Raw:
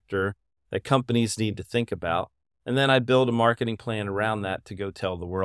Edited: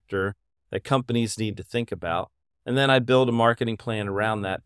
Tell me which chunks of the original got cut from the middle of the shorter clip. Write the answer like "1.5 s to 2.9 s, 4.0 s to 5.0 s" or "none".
none